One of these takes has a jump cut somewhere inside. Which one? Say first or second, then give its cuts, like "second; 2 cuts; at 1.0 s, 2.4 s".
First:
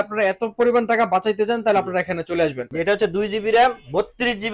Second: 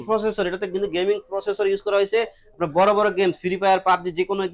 first; 1 cut; at 2.7 s